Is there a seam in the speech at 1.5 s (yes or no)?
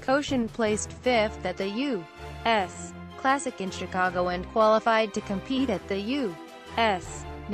no